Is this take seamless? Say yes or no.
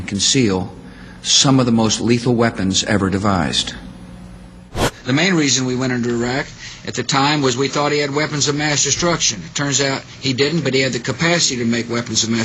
no